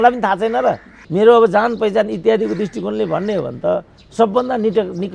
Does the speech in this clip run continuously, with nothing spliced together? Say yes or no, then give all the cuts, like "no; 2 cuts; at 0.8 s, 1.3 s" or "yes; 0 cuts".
no; 1 cut; at 0.9 s